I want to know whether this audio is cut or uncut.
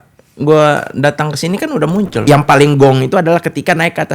cut